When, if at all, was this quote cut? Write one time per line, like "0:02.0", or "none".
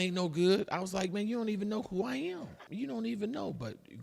0:02.3